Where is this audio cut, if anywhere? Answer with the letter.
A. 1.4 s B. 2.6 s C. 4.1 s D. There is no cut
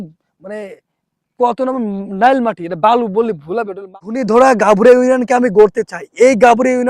C